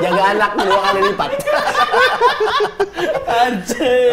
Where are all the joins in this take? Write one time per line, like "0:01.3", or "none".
none